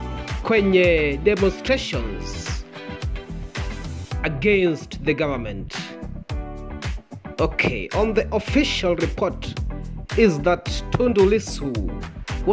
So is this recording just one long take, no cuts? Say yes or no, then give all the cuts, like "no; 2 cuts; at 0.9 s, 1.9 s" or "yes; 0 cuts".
no; 2 cuts; at 6.0 s, 7.4 s